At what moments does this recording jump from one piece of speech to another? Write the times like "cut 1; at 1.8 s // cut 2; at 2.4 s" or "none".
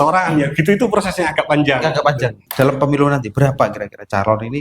cut 1; at 2.4 s